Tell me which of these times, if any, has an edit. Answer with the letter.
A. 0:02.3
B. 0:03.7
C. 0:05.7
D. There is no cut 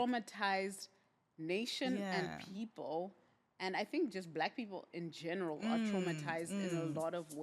D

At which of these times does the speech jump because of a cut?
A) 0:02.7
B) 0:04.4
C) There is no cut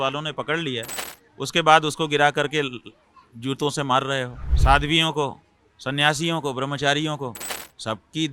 B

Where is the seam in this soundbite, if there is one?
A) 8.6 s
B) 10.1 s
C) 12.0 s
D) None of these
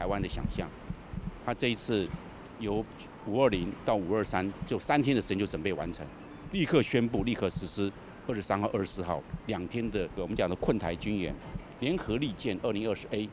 B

